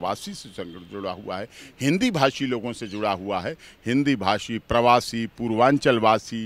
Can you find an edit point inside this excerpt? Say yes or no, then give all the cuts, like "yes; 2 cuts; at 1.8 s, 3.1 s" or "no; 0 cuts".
no; 0 cuts